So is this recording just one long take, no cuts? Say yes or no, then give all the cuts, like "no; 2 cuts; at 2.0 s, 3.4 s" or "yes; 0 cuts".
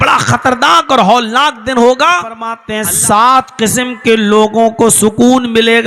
no; 1 cut; at 2.7 s